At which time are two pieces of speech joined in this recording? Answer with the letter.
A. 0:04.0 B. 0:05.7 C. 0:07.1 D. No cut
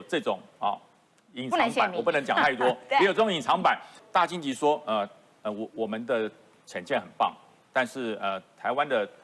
A